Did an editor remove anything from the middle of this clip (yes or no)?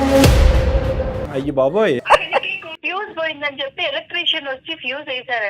yes